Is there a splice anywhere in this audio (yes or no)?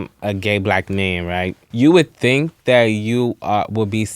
yes